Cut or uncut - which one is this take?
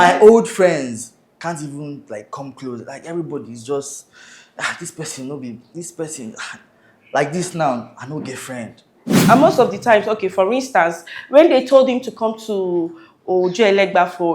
cut